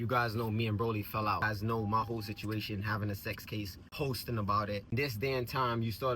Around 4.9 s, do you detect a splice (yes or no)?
yes